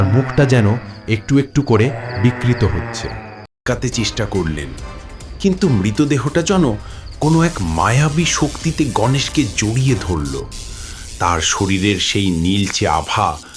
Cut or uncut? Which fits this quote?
cut